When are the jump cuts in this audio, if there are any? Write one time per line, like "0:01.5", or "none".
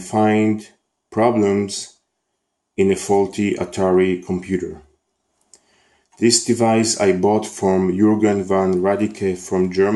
0:09.0